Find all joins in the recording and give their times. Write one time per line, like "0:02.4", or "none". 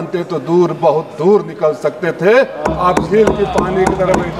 none